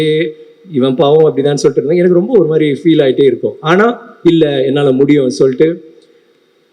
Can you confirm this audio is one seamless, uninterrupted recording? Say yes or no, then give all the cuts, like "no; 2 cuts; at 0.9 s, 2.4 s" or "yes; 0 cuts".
yes; 0 cuts